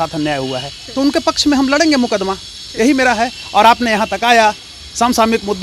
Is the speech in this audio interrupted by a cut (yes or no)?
no